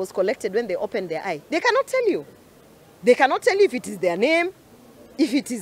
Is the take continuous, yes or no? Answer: yes